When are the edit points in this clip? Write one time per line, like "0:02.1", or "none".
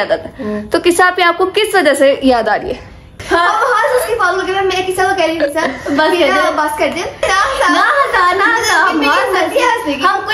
0:03.1
0:07.2